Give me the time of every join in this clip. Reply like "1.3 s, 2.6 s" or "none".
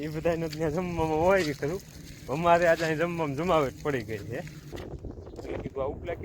4.8 s